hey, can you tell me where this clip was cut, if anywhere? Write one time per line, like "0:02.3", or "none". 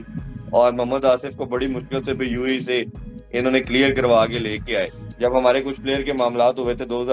0:05.0